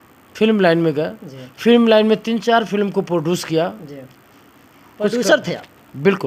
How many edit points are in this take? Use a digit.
0